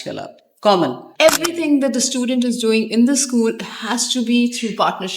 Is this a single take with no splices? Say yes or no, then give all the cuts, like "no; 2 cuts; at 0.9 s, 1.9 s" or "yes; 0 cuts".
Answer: no; 1 cut; at 1.1 s